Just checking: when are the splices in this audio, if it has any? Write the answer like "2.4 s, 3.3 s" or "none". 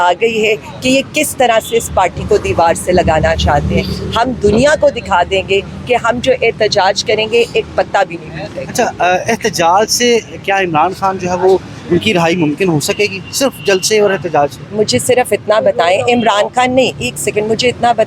none